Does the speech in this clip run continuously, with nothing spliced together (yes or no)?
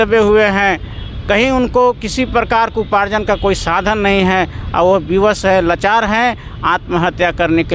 yes